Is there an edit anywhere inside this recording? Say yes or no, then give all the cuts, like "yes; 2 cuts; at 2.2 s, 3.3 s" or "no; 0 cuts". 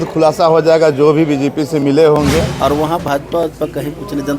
yes; 1 cut; at 2.5 s